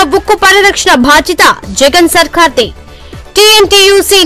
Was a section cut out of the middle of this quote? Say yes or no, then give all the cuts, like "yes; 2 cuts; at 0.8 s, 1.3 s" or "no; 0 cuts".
no; 0 cuts